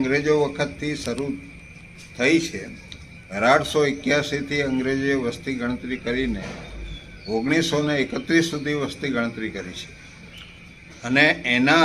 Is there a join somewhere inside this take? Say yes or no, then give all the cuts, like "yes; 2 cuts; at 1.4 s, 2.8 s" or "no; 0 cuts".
no; 0 cuts